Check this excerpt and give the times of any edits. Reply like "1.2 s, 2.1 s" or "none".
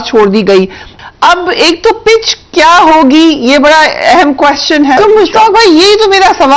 0.9 s, 5.0 s